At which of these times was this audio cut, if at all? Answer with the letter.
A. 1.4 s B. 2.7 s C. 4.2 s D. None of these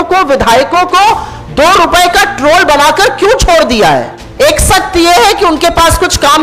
C